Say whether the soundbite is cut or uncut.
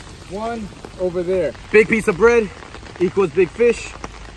cut